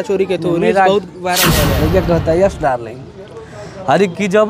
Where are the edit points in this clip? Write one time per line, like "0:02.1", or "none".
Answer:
0:01.6